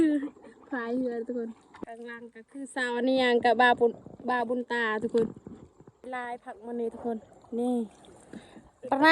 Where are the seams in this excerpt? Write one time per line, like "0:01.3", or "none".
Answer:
0:01.8
0:06.0